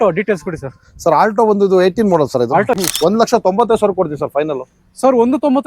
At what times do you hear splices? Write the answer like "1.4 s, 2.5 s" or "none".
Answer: 2.7 s